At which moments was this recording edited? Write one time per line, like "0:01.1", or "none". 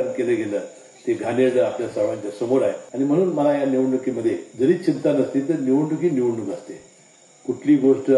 0:02.8
0:04.5